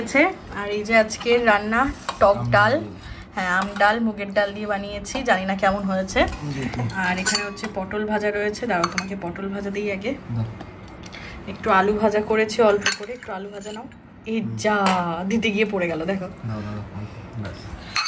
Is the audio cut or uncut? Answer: uncut